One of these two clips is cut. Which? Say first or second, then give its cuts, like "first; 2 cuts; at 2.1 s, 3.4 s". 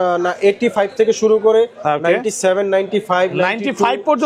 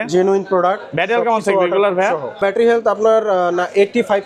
second; 1 cut; at 2.4 s